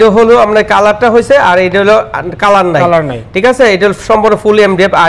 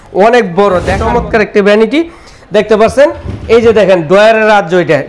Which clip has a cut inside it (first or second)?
second